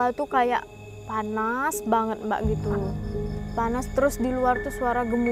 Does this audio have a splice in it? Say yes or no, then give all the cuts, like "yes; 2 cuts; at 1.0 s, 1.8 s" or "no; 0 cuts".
no; 0 cuts